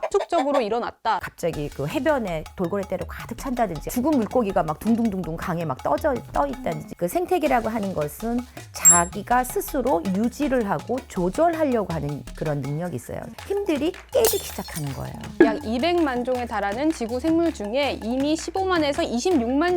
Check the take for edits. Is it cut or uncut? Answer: cut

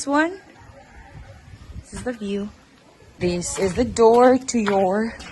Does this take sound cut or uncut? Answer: cut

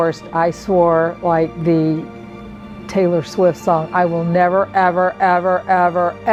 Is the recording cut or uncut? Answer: uncut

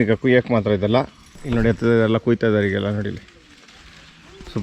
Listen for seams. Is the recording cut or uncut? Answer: cut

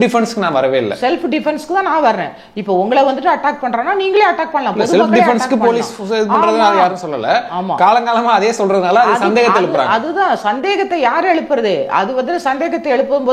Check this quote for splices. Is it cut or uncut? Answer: uncut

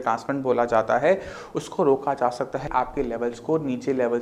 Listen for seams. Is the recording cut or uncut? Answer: cut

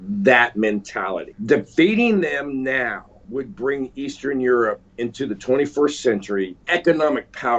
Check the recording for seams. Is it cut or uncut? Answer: cut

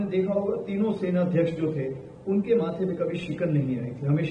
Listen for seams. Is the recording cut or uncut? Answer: uncut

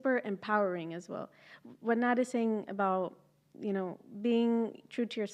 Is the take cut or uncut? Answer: uncut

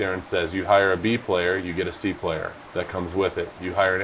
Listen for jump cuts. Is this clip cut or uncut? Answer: cut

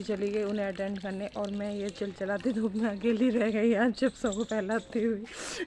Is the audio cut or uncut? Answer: cut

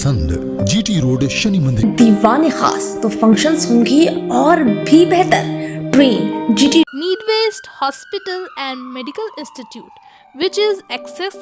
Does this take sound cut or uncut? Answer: cut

